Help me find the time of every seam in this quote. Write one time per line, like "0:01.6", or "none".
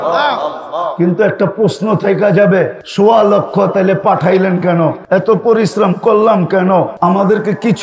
0:02.8
0:05.0
0:06.9